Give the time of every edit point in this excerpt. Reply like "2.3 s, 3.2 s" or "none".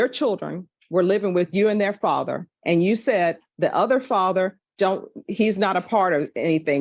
4.3 s